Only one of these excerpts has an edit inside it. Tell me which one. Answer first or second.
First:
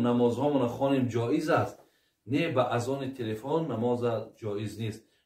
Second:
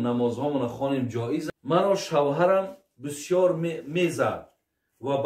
second